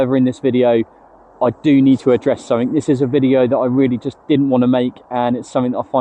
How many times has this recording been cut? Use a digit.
0